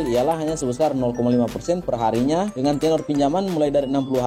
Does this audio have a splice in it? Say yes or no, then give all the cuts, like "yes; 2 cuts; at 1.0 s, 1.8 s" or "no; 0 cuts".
no; 0 cuts